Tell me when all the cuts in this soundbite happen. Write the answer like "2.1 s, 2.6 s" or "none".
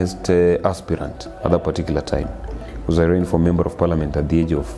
none